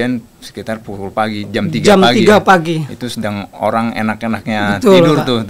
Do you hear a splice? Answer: no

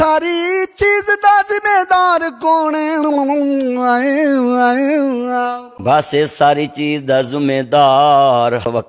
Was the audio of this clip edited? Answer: no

